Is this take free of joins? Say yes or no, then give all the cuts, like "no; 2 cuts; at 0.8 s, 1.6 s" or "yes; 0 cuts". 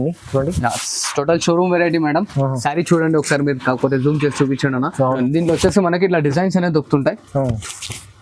no; 1 cut; at 5.2 s